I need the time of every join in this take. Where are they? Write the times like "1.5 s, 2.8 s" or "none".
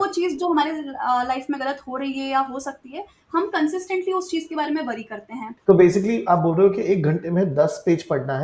5.4 s

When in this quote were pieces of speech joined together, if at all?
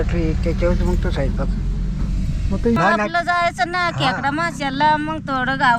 2.8 s

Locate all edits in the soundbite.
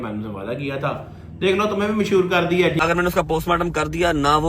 2.8 s

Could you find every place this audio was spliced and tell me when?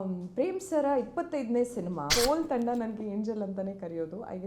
2.0 s

